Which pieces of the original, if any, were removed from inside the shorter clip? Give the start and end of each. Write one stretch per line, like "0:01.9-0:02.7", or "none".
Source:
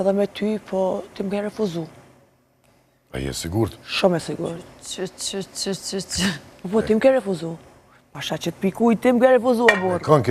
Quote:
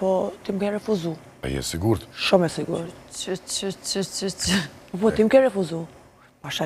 0:02.0-0:03.0